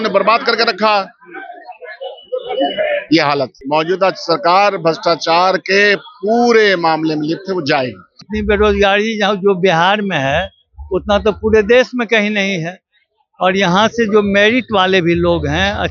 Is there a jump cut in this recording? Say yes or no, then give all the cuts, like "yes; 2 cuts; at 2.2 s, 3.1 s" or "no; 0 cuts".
yes; 2 cuts; at 3.6 s, 8.1 s